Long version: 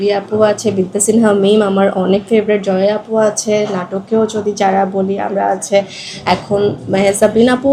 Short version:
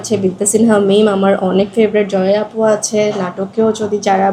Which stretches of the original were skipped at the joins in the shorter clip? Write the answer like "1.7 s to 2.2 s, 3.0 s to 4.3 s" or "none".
none